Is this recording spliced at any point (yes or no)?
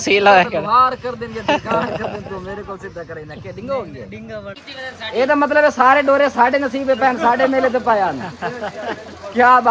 yes